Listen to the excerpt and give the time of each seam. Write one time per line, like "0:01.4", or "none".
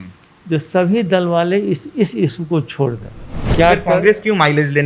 0:03.5